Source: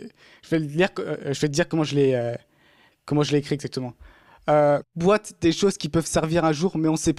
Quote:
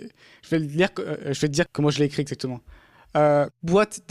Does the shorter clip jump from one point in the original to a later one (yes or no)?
yes